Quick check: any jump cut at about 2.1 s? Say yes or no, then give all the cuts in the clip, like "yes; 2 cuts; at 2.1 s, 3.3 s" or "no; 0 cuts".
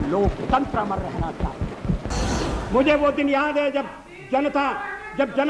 yes; 1 cut; at 2.1 s